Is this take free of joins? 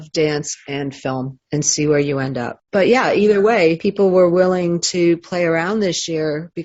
yes; 0 cuts

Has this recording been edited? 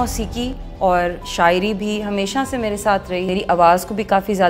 yes; 1 cut; at 3.3 s

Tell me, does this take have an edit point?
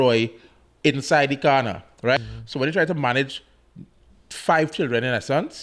yes; 1 cut; at 2.2 s

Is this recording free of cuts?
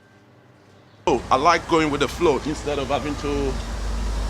no; 1 cut; at 1.1 s

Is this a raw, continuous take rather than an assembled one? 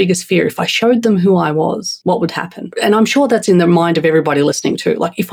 no; 2 cuts; at 1.9 s, 2.6 s

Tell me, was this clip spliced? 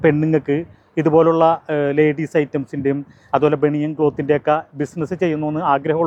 no; 0 cuts

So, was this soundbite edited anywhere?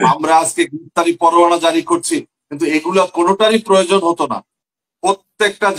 yes; 1 cut; at 4.7 s

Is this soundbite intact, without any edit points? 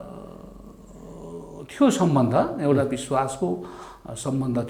yes; 0 cuts

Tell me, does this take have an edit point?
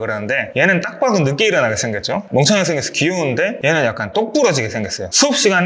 no; 0 cuts

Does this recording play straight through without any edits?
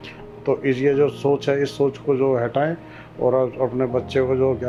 yes; 0 cuts

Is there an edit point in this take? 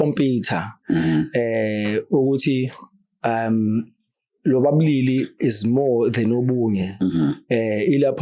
no; 0 cuts

